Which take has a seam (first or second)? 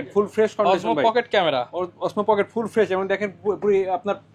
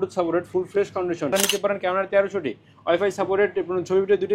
second